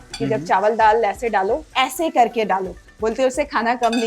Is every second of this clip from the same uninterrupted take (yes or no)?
no